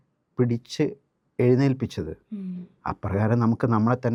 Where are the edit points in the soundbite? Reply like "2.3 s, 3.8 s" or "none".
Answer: none

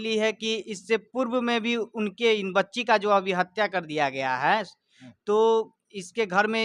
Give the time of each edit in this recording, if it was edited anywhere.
none

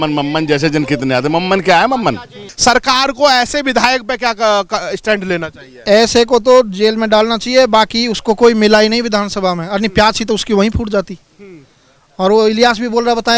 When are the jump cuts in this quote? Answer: 2.5 s

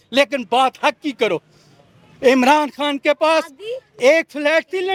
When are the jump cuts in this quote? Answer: none

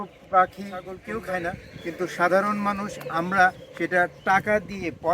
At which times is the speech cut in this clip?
1.0 s

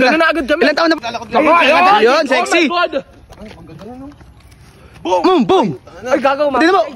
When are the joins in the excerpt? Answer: 1.0 s

